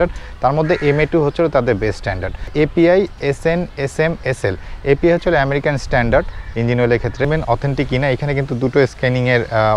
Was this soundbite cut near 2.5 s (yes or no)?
yes